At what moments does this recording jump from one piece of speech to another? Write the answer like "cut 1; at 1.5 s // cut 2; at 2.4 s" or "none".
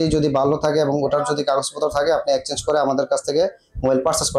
none